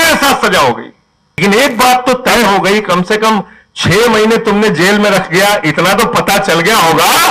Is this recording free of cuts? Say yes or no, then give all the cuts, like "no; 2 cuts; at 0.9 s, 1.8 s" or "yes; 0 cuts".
no; 1 cut; at 1.4 s